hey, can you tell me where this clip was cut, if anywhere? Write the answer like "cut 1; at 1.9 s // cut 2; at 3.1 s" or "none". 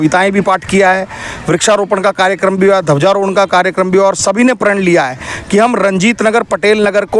none